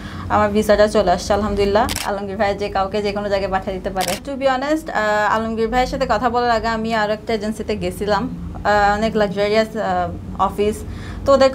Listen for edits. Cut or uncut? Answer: cut